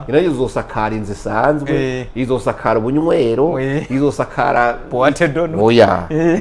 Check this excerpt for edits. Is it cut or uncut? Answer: uncut